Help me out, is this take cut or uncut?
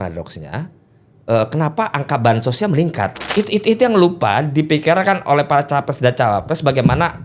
cut